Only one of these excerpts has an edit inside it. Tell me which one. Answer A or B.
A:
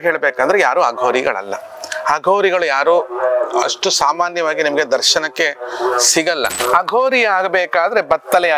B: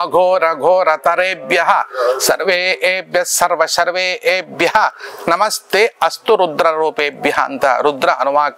A